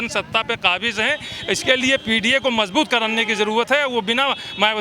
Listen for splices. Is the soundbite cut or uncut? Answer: uncut